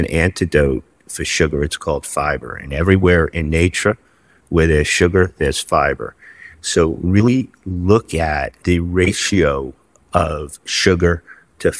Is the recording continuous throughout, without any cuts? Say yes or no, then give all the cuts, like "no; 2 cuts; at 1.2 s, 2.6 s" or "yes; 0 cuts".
no; 1 cut; at 8.6 s